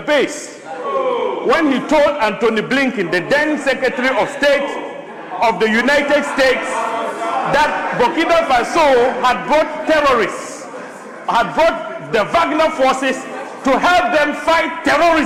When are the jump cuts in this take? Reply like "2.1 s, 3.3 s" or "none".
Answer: none